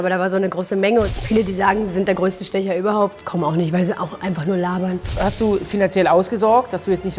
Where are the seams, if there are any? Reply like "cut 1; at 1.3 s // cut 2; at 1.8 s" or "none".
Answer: cut 1; at 1.1 s // cut 2; at 3.2 s // cut 3; at 5.1 s